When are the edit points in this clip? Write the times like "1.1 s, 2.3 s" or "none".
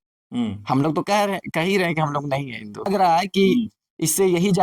2.9 s